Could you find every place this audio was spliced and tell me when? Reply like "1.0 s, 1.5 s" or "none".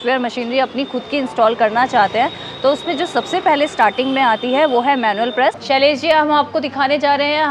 5.6 s